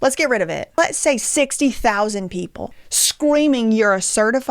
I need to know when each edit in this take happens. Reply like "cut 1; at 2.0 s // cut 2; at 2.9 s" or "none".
cut 1; at 0.9 s